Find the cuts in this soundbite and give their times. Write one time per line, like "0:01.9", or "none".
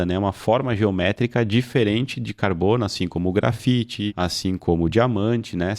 0:04.1